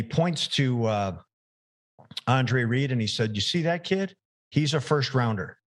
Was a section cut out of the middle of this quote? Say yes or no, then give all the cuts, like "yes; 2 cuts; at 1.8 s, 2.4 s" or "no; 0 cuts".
no; 0 cuts